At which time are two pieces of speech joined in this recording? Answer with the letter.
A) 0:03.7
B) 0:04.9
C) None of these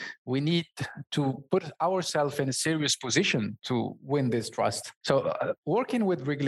B